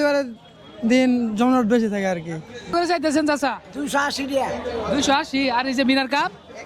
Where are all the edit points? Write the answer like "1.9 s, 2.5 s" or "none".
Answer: 2.7 s